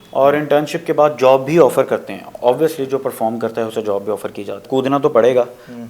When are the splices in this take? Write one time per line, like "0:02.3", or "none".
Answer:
0:04.6